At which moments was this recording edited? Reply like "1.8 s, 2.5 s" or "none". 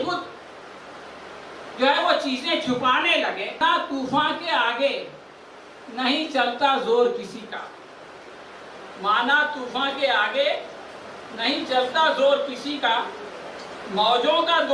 3.6 s